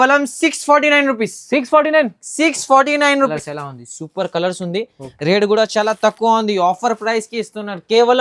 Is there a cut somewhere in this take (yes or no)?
yes